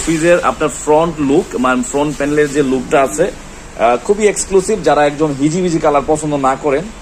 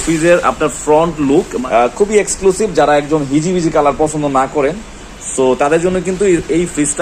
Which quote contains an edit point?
second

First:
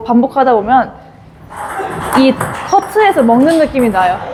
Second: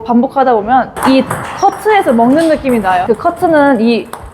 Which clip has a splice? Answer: second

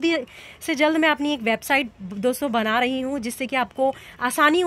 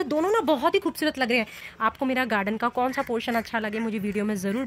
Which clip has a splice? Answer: second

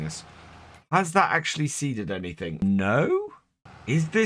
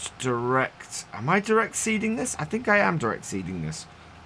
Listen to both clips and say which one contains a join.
first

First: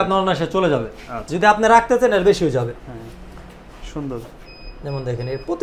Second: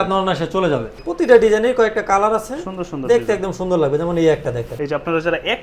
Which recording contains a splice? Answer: second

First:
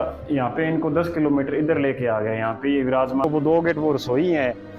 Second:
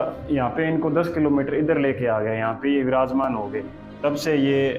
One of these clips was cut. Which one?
first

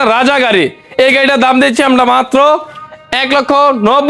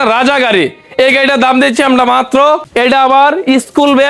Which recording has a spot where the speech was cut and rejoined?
second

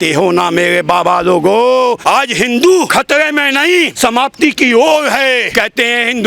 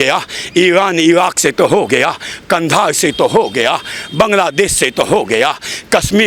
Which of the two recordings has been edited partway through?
first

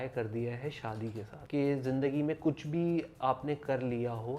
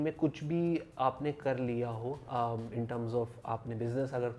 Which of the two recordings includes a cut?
first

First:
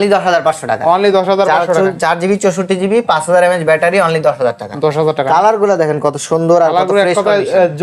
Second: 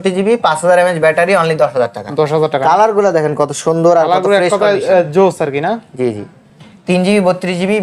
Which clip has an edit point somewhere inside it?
second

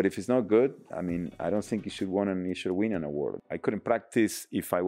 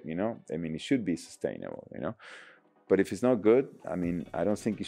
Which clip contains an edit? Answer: first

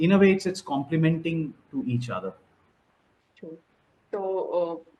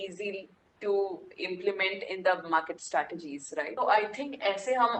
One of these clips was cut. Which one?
second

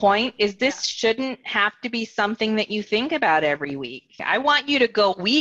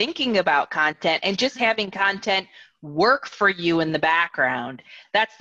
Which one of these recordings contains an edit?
first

